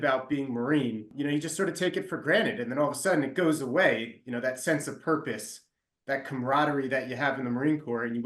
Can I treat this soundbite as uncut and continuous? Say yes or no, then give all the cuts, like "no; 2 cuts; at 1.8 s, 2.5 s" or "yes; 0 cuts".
no; 1 cut; at 1.1 s